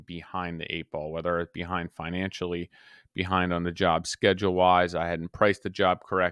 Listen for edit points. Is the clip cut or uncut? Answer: uncut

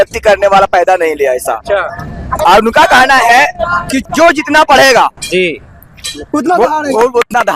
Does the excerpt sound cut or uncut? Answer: cut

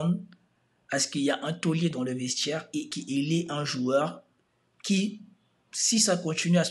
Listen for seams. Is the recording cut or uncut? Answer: uncut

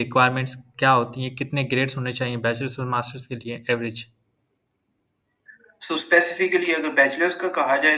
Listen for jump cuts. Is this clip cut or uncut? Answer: uncut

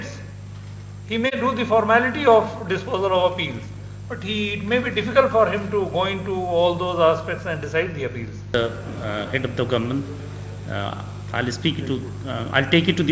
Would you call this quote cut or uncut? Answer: cut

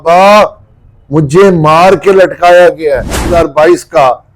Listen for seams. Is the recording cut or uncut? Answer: cut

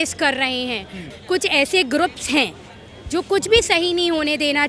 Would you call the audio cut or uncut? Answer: cut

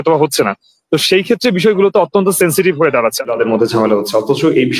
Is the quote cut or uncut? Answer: cut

